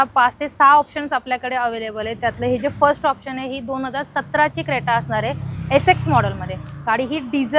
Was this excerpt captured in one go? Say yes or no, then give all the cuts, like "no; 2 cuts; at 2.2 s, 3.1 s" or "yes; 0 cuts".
yes; 0 cuts